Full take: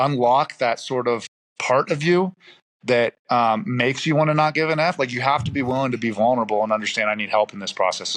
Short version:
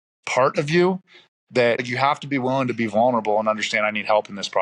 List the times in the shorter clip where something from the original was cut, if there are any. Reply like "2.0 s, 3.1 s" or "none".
1.9 s